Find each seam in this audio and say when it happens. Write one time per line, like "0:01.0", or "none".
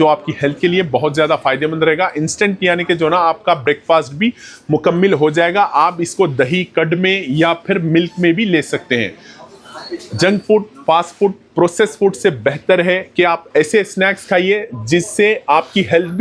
none